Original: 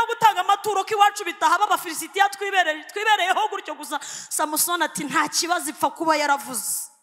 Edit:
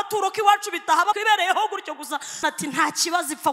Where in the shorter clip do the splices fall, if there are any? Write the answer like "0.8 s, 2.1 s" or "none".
1.1 s, 2.4 s

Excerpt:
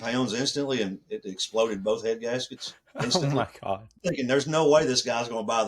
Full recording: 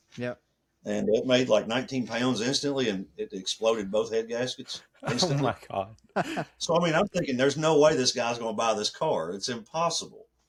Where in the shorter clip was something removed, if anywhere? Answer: 4.0 s

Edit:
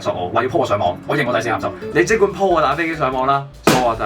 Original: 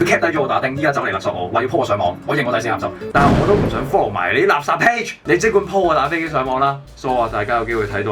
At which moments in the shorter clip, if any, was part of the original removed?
1.8 s

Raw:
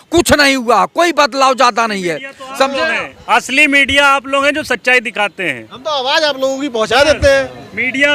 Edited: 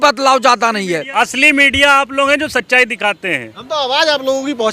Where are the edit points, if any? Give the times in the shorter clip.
1.1 s

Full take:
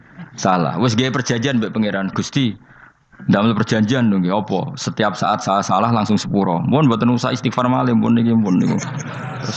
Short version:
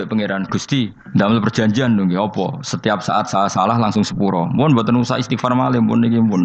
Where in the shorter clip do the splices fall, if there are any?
1.0 s

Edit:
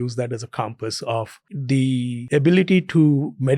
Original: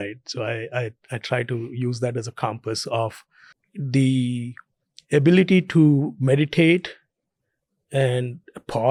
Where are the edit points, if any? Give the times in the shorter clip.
1.4 s, 2.2 s

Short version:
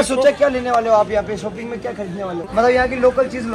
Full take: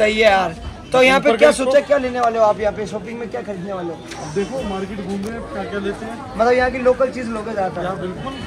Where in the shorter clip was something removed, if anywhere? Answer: 2.4 s

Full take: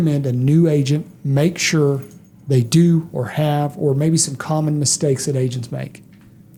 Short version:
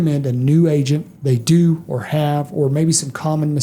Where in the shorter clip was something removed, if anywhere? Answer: 1.1 s

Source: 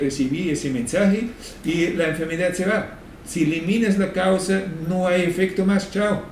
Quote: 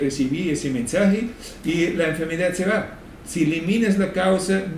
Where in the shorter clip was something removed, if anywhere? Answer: none

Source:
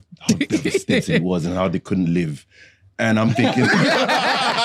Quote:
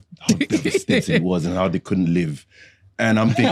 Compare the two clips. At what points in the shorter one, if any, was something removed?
none

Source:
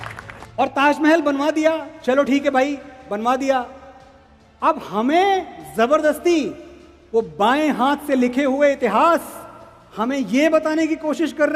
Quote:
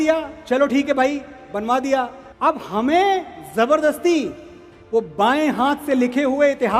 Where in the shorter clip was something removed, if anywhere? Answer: 2.2 s

